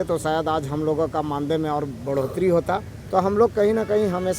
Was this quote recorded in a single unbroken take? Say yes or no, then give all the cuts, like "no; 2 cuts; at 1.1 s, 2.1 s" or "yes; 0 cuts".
no; 1 cut; at 2.9 s